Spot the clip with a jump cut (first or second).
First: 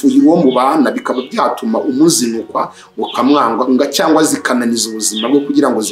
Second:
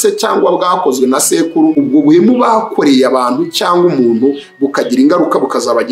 second